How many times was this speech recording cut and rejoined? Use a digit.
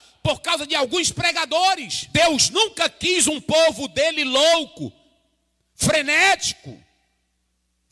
1